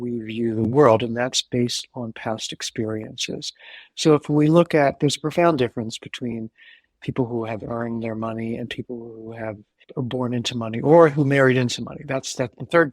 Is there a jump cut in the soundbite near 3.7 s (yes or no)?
no